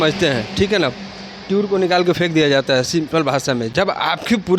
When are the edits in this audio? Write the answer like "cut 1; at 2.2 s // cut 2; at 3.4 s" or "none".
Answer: none

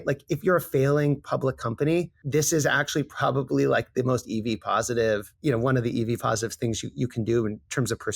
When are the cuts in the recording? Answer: cut 1; at 2.2 s // cut 2; at 5.3 s

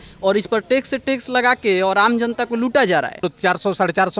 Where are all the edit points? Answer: cut 1; at 3.3 s

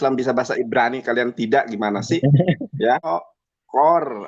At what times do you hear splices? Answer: cut 1; at 3.1 s

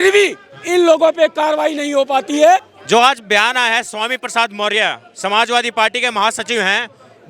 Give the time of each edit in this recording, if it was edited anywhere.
cut 1; at 2.7 s

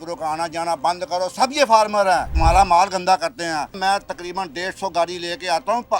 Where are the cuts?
cut 1; at 2.3 s // cut 2; at 3.8 s

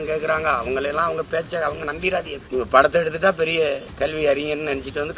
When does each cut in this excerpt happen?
cut 1; at 2.4 s // cut 2; at 3.9 s

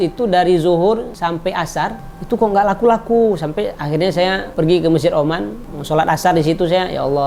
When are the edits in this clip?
none

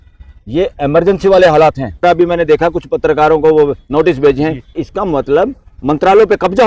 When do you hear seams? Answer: cut 1; at 2.0 s // cut 2; at 4.8 s

